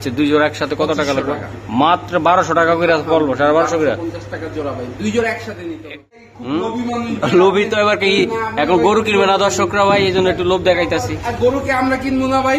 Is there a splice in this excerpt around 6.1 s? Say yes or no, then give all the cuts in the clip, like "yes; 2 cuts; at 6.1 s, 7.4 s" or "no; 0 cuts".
yes; 1 cut; at 6.1 s